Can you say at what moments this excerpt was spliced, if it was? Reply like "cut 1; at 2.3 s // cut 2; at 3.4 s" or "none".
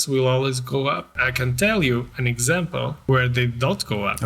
cut 1; at 1.2 s // cut 2; at 3.0 s